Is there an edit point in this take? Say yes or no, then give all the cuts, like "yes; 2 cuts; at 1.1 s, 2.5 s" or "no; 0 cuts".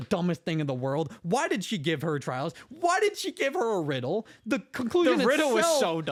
no; 0 cuts